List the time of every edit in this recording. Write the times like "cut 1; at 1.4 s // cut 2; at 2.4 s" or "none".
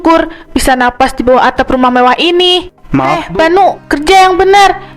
cut 1; at 3.2 s